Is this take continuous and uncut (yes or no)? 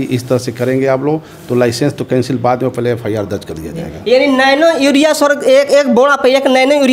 yes